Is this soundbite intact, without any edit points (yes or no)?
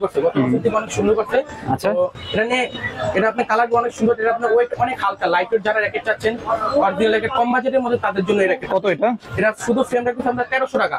yes